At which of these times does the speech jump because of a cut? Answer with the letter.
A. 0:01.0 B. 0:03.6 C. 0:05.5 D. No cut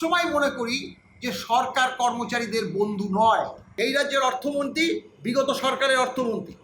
B